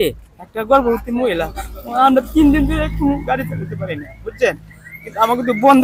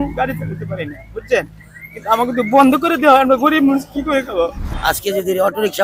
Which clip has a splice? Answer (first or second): second